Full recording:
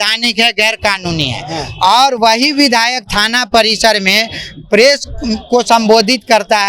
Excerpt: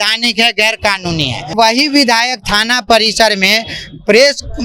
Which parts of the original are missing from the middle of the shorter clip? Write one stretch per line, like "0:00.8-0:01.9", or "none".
0:01.5-0:02.2